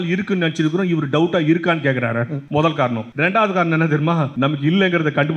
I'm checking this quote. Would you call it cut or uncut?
cut